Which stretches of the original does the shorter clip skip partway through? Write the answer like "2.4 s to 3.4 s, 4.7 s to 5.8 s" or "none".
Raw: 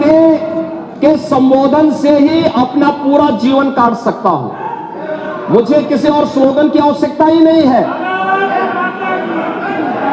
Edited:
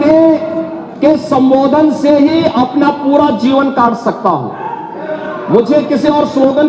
none